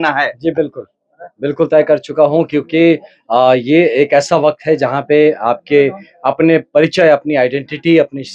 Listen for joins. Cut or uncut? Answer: uncut